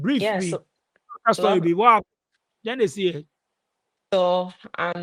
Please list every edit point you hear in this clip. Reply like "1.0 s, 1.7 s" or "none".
none